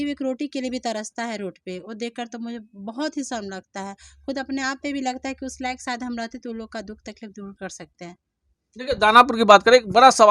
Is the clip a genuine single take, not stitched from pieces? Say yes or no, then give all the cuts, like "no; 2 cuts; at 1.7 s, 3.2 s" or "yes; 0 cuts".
yes; 0 cuts